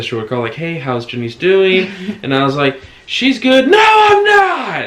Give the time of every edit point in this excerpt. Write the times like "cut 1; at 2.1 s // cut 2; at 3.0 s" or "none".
none